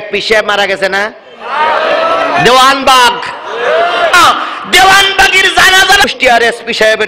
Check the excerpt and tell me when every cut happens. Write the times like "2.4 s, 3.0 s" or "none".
4.1 s, 6.0 s